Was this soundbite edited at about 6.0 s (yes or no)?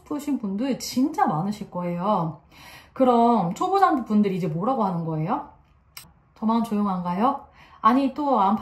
yes